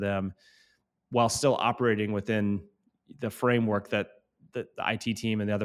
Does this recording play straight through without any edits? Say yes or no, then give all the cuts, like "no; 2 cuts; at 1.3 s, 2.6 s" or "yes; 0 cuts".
yes; 0 cuts